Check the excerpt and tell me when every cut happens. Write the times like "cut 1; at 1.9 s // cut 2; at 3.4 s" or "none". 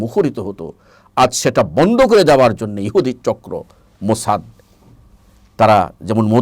none